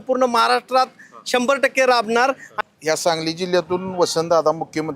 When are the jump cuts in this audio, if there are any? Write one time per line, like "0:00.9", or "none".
0:02.5